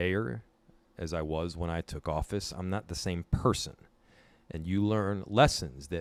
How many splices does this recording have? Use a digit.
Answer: 0